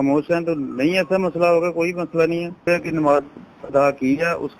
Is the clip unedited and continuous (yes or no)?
no